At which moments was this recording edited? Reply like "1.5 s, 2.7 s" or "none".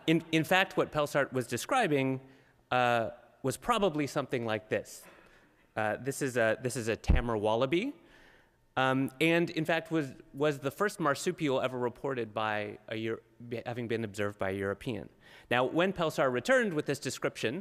2.5 s